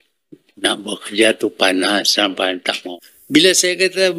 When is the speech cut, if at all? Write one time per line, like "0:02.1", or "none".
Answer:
0:02.9